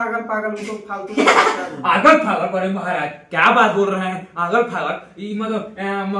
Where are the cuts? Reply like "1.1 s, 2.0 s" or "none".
none